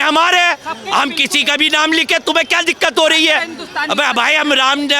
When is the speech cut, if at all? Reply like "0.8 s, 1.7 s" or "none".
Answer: none